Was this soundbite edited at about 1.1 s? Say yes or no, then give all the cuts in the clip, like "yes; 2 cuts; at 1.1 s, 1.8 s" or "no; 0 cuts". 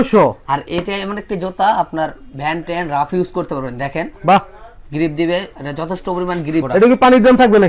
no; 1 cut; at 6.7 s